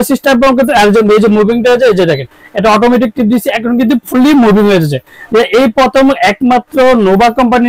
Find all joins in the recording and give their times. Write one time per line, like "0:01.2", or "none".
none